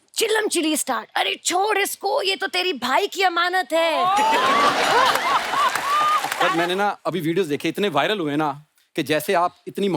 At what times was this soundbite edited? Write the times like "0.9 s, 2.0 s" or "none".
6.4 s